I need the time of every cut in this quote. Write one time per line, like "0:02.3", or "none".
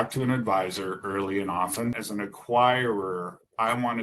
0:02.0